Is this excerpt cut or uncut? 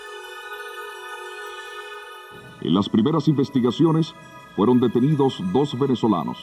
cut